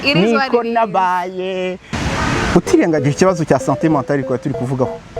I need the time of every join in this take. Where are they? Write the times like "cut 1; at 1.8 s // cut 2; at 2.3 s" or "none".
cut 1; at 1.9 s

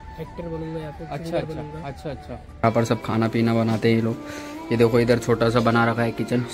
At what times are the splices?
cut 1; at 2.6 s

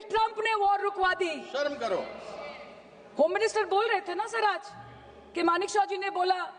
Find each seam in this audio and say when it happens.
none

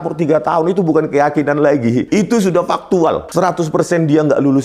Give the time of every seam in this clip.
cut 1; at 2.1 s // cut 2; at 3.2 s

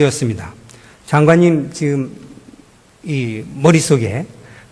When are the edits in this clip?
cut 1; at 1.2 s

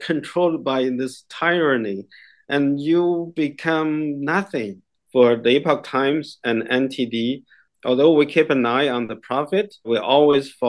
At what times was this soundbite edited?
cut 1; at 4.9 s // cut 2; at 7.6 s // cut 3; at 9.9 s

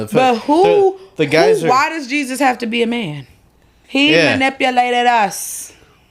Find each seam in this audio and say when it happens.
cut 1; at 3.8 s

